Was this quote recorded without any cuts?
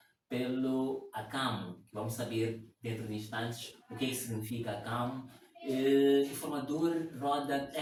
yes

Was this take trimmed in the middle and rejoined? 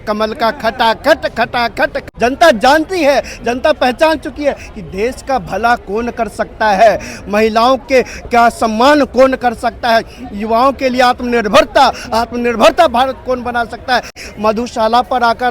yes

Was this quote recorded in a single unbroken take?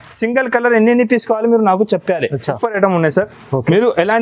no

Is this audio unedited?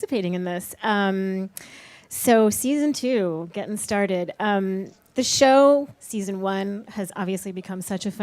no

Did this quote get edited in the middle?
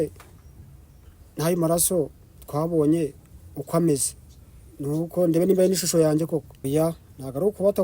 yes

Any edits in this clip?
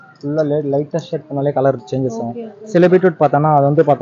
no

